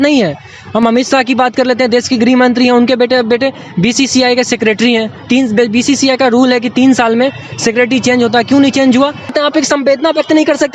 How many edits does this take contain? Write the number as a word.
two